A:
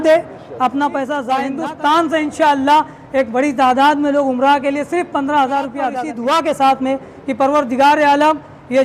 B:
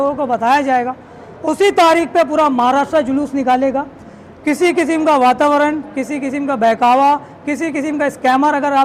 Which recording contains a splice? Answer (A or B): A